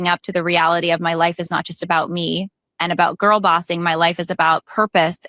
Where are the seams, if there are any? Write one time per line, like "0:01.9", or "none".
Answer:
none